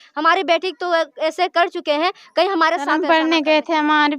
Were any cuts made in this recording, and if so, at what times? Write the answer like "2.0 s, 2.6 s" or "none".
3.0 s